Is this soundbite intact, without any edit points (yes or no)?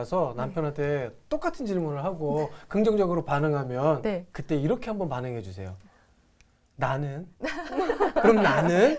yes